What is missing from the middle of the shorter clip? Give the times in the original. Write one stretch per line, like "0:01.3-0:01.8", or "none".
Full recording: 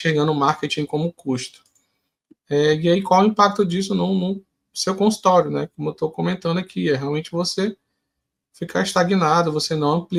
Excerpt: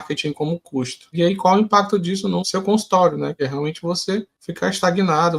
0:01.7-0:02.8
0:04.1-0:04.7
0:05.7-0:06.9
0:07.9-0:08.5

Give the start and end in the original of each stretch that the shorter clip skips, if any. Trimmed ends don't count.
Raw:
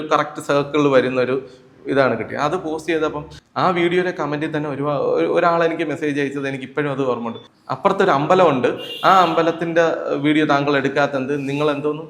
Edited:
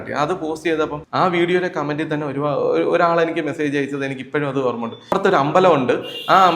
0:03.2-0:03.4
0:07.5-0:07.9

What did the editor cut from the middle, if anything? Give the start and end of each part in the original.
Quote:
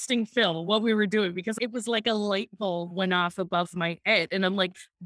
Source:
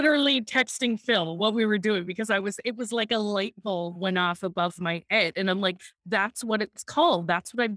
0:02.3-0:02.6

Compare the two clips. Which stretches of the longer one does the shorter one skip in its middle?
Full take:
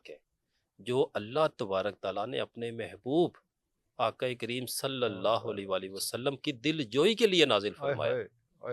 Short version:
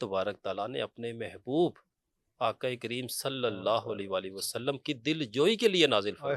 none

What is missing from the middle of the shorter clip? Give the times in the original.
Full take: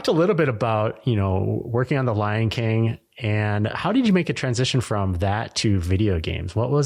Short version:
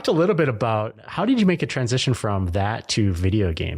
0:01.0-0:03.7

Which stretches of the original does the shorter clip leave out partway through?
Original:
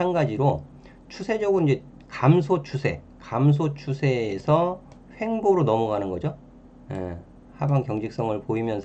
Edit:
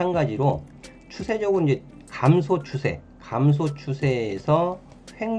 none

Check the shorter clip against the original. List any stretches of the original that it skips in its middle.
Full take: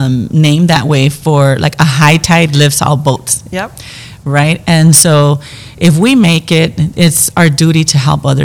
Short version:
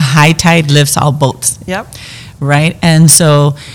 none

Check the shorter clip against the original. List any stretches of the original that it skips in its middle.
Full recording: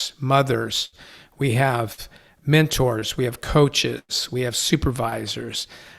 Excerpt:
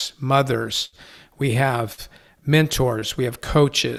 none

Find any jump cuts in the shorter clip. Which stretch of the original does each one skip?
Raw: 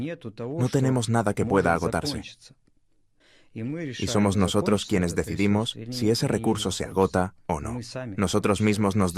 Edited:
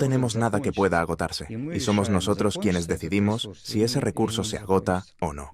0:02.4-0:03.9

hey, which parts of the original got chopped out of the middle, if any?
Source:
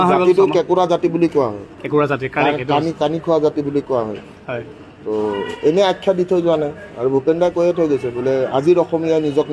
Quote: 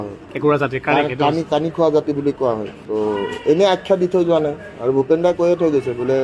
0:04.2-0:04.9

